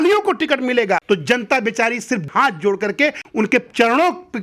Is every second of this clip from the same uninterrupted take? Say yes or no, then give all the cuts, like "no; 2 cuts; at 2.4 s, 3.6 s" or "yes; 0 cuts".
no; 3 cuts; at 1.0 s, 2.3 s, 3.2 s